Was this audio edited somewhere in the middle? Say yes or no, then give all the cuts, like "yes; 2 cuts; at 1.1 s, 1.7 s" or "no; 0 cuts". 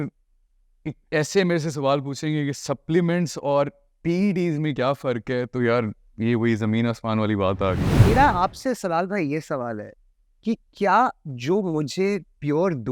yes; 1 cut; at 7.9 s